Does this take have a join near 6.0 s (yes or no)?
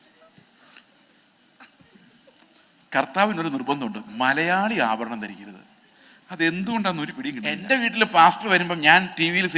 no